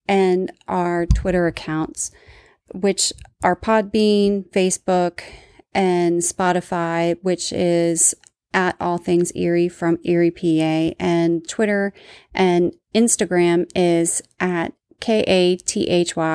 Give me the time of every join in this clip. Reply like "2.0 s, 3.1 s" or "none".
none